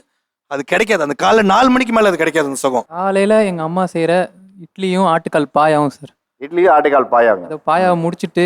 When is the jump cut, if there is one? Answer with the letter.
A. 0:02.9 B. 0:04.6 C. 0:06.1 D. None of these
A